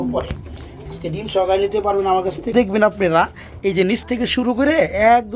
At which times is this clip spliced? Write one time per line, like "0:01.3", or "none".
0:02.5

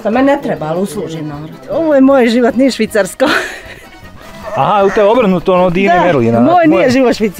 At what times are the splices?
0:01.7

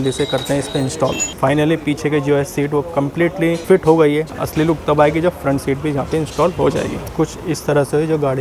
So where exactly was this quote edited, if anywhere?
0:01.3
0:03.6
0:04.4
0:07.0

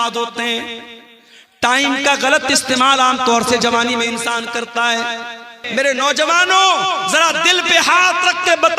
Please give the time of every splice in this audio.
0:05.6

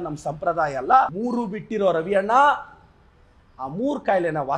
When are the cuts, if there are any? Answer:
0:01.1

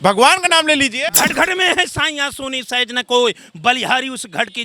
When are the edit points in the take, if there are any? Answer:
0:01.0

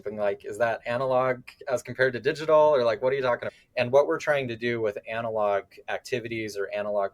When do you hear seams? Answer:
0:03.4

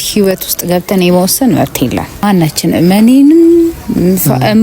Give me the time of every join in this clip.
0:02.2

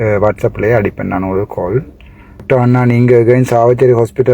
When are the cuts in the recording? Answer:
0:02.4

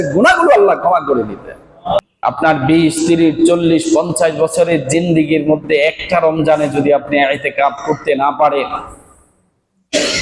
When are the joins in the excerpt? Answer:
0:02.0

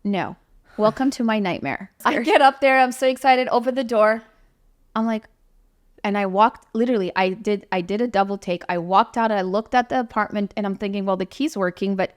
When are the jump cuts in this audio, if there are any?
0:02.0

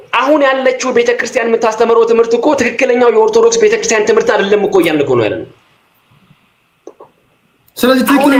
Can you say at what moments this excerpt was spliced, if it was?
none

